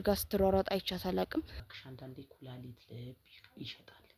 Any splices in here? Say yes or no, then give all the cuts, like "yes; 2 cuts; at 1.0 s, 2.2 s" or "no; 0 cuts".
yes; 1 cut; at 1.6 s